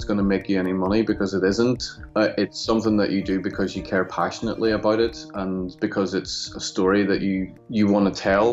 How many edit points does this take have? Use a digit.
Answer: 1